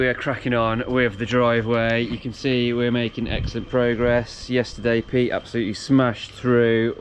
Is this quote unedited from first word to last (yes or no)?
yes